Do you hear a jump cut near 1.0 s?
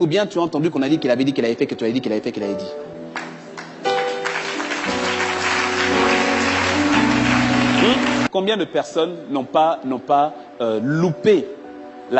no; 1 cut; at 8.3 s

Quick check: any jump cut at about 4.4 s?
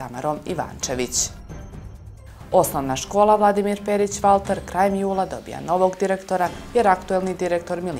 no; 0 cuts

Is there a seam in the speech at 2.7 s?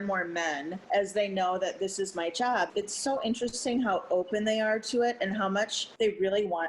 yes; 1 cut; at 2.7 s

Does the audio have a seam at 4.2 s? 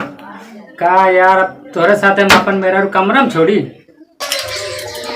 yes; 1 cut; at 4.2 s

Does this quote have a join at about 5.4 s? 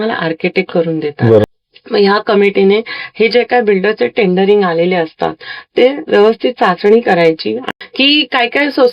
no; 2 cuts; at 1.4 s, 7.6 s

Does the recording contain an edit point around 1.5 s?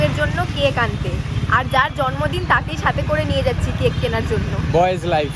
no; 0 cuts

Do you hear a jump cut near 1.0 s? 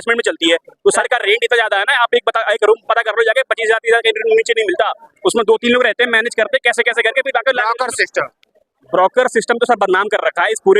yes; 1 cut; at 1.0 s

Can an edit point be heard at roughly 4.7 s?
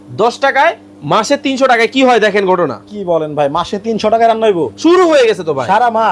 no; 0 cuts

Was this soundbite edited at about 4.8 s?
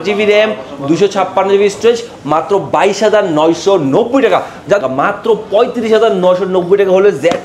yes; 1 cut; at 4.8 s

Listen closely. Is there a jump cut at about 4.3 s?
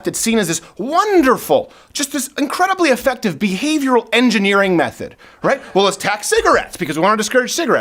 no; 0 cuts

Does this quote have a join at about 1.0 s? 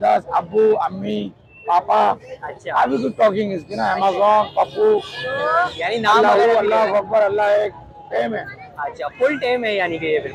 no; 0 cuts

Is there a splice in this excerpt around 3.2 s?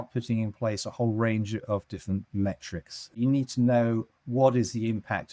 yes; 1 cut; at 3.2 s

